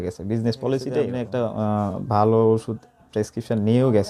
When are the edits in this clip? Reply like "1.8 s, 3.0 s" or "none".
1.2 s